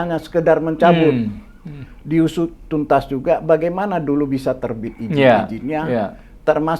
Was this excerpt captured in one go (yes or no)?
yes